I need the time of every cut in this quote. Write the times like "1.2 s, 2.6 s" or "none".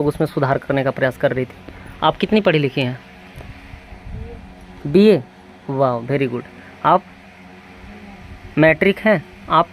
none

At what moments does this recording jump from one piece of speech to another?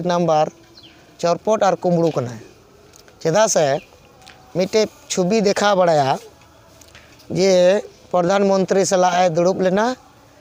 none

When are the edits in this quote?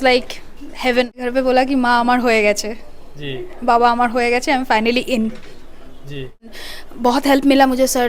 1.2 s, 6.5 s

